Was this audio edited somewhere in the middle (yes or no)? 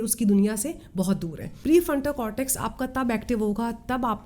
yes